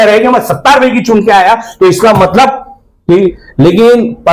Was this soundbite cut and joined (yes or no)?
yes